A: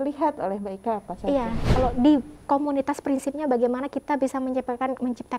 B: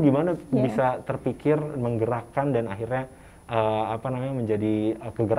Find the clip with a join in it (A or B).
A